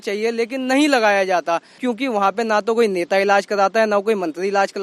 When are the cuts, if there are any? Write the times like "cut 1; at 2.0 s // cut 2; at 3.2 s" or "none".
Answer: cut 1; at 1.9 s